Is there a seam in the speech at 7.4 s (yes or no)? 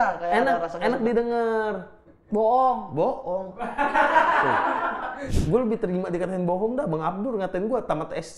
no